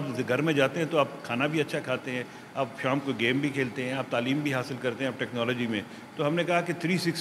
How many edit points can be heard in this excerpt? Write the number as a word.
zero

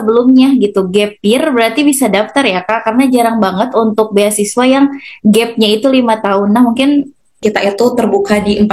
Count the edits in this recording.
one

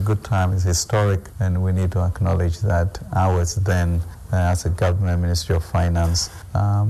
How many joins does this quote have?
zero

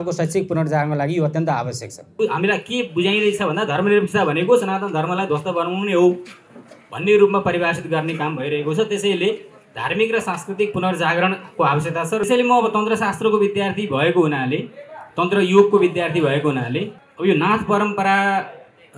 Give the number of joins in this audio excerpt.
three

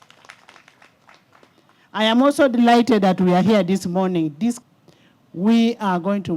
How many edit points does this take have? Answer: one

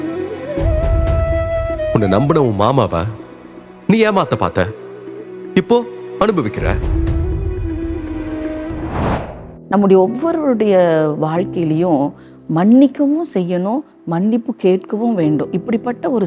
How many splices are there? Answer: one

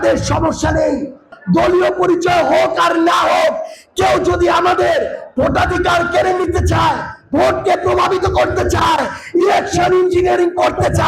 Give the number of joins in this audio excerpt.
one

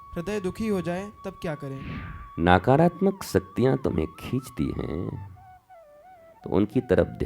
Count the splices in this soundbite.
one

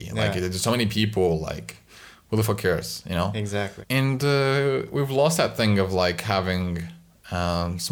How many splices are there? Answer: one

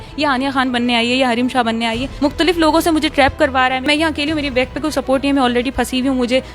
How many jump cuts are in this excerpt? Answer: two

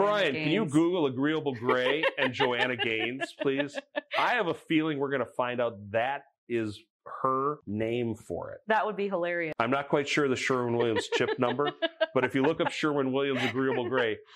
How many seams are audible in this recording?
two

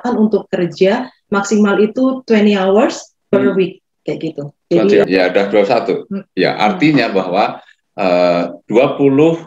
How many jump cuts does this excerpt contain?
one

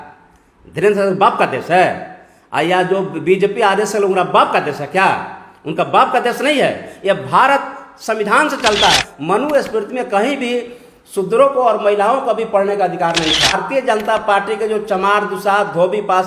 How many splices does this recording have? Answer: two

